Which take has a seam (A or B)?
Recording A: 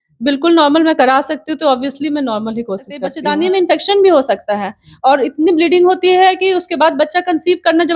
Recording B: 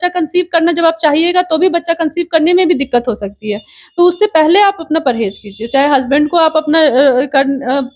A